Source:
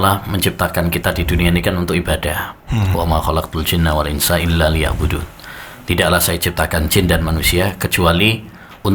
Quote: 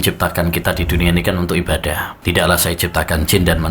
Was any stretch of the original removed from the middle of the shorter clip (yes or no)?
yes